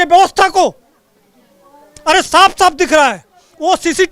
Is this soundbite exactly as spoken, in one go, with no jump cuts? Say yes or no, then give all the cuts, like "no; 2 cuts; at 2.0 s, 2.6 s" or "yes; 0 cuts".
yes; 0 cuts